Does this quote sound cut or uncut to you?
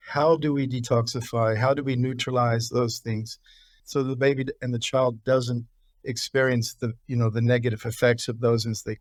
uncut